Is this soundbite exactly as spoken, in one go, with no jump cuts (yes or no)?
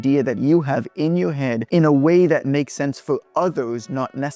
no